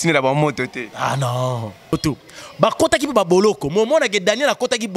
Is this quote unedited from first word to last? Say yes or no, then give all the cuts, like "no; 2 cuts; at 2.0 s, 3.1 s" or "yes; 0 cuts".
no; 1 cut; at 2.0 s